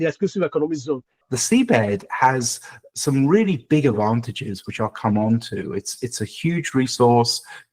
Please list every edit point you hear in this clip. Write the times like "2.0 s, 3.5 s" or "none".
1.2 s